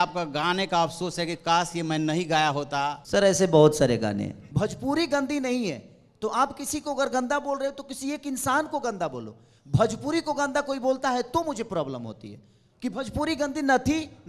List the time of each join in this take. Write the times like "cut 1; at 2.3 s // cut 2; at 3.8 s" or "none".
cut 1; at 3.0 s // cut 2; at 4.4 s